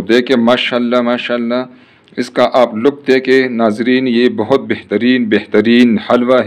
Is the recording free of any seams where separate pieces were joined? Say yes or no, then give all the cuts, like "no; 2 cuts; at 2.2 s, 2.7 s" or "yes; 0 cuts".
yes; 0 cuts